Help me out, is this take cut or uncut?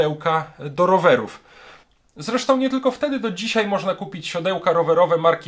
uncut